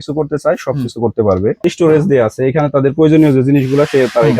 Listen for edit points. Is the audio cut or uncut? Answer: cut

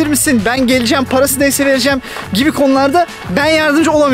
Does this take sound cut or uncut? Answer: uncut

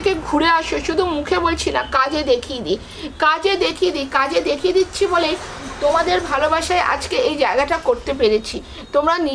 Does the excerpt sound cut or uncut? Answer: uncut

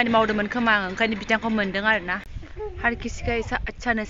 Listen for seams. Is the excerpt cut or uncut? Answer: cut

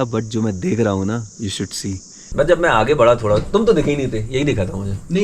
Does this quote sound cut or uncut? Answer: cut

